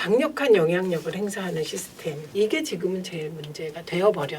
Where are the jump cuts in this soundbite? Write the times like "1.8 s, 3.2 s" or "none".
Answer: 2.2 s